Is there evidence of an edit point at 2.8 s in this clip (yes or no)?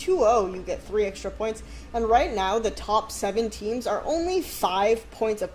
no